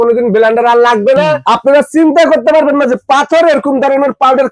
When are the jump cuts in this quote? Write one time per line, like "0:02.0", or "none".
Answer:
0:01.4